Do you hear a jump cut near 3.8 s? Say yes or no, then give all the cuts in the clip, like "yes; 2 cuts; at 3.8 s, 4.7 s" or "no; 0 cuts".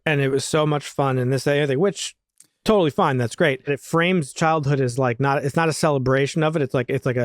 yes; 1 cut; at 3.8 s